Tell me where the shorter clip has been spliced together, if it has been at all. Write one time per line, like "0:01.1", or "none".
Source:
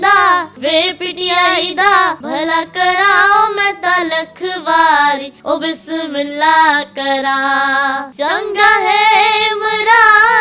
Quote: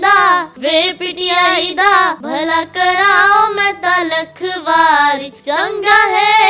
0:05.3